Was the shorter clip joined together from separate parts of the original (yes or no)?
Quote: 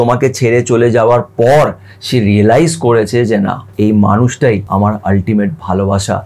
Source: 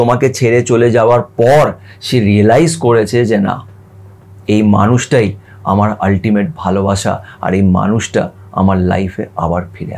yes